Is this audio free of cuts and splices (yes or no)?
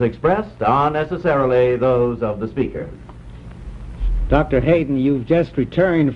yes